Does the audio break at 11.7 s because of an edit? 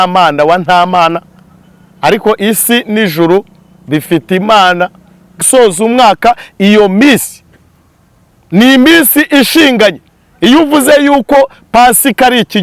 no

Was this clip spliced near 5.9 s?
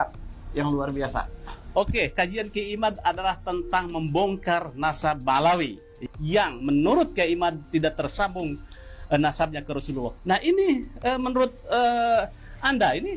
yes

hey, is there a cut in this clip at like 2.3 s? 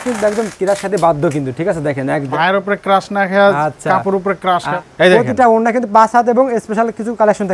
yes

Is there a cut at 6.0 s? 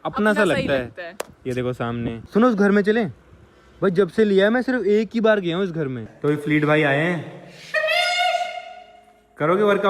yes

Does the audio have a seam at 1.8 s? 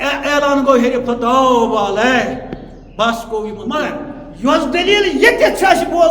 no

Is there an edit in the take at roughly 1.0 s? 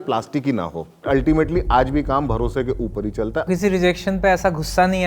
yes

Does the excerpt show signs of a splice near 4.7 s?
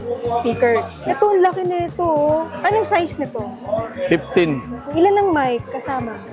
yes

